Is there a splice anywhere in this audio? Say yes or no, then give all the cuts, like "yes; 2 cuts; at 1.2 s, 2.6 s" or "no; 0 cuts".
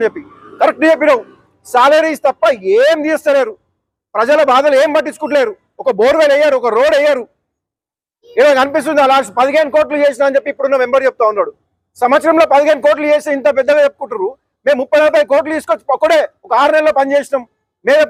no; 0 cuts